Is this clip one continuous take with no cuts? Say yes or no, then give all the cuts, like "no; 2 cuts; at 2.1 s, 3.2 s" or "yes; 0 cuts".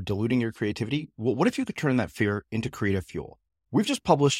yes; 0 cuts